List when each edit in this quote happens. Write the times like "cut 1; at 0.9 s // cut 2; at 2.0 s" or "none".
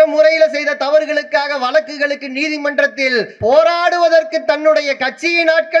cut 1; at 3.3 s